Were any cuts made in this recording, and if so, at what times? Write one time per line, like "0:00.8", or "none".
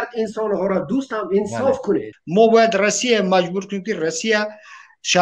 0:02.2